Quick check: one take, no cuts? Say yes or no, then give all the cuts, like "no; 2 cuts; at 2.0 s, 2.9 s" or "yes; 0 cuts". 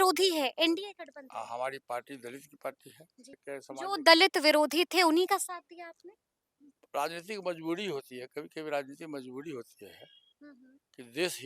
no; 1 cut; at 3.4 s